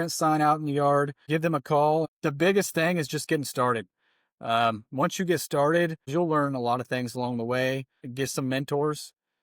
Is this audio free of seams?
no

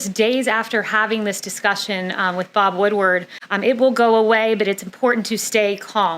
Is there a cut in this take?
yes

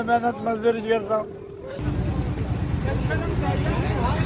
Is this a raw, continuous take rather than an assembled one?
yes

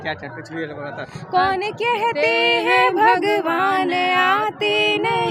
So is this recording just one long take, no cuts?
no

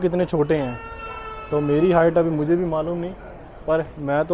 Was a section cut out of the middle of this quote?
no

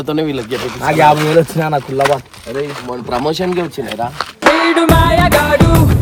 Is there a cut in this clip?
no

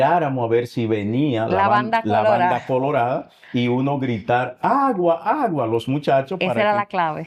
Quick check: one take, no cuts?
yes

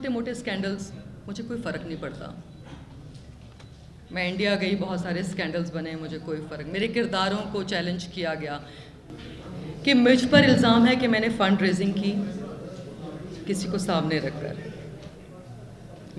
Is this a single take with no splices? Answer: yes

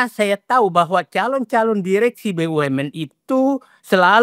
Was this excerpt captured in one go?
yes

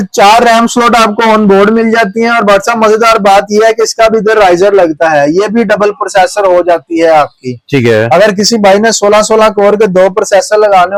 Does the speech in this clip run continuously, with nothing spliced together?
yes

